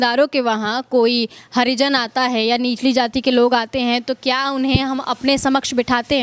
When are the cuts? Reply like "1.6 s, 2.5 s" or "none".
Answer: none